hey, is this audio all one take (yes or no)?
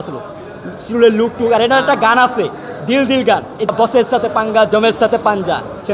no